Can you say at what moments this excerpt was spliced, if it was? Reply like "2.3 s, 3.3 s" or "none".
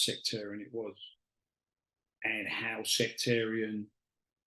none